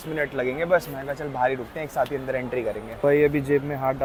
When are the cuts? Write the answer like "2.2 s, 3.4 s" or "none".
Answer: none